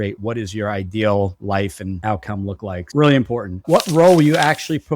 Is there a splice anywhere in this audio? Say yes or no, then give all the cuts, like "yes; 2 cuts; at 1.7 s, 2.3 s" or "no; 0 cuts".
no; 0 cuts